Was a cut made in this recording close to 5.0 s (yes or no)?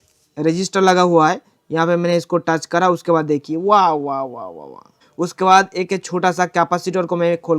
yes